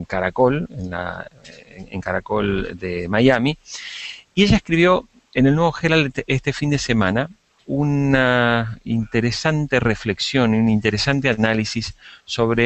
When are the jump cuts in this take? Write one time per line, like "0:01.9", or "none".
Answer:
0:03.5